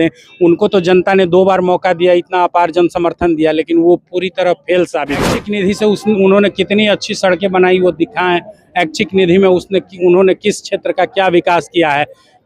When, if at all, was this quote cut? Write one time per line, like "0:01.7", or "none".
0:05.3